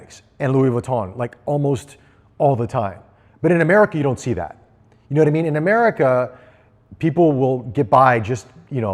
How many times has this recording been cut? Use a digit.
0